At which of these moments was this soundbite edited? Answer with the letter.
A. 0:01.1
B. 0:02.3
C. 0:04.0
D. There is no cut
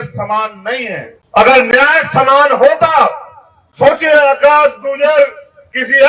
A